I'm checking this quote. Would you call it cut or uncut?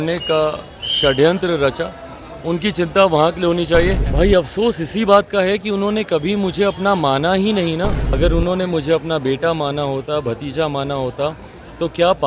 cut